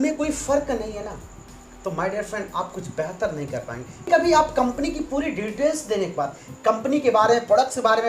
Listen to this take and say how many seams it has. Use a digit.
1